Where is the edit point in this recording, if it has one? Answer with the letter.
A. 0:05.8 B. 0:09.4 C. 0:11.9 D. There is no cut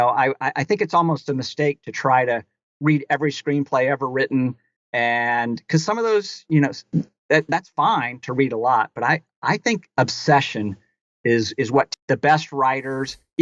C